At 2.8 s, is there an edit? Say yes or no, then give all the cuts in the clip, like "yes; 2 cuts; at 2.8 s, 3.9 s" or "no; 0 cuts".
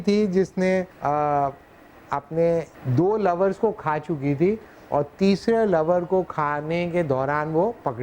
yes; 2 cuts; at 0.9 s, 2.8 s